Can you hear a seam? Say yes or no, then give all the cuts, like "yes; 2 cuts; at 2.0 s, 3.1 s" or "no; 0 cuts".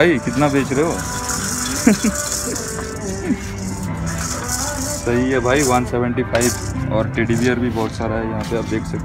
no; 0 cuts